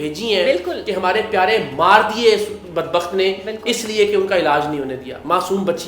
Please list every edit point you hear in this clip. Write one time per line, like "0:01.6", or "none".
none